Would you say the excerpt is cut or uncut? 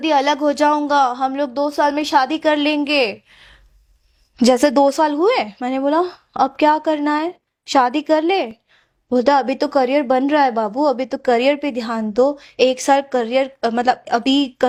uncut